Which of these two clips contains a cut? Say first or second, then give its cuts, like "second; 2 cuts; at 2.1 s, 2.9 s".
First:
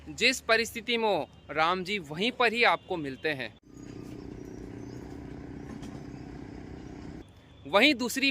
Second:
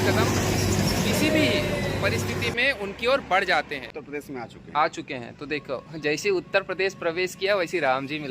second; 1 cut; at 3.9 s